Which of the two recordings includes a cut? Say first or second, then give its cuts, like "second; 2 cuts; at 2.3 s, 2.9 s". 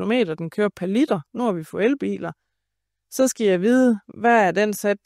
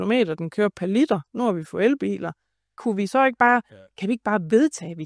second; 1 cut; at 2.8 s